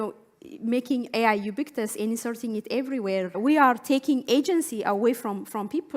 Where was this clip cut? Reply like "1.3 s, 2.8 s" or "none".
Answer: 3.4 s